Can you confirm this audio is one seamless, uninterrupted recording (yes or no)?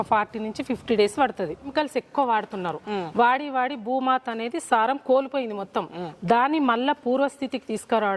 no